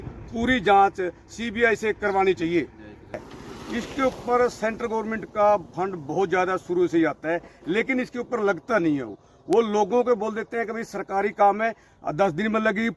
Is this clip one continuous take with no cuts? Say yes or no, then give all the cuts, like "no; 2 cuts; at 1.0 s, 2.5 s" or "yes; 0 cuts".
no; 1 cut; at 3.3 s